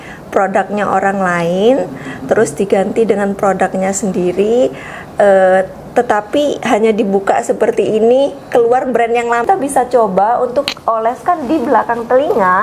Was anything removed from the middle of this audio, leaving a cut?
yes; 1 cut; at 9.4 s

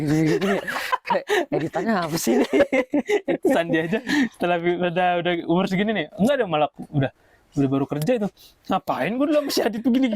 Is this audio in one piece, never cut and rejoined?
yes; 0 cuts

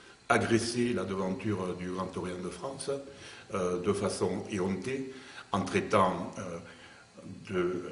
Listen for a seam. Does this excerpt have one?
no; 0 cuts

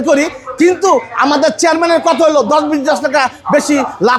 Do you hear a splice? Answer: no; 0 cuts

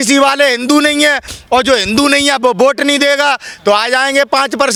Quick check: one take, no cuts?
yes; 0 cuts

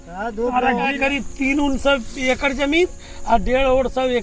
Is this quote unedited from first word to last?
no; 1 cut; at 1.0 s

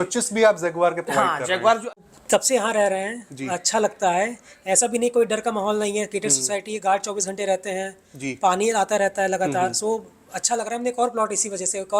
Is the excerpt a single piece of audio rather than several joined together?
no; 1 cut; at 2.0 s

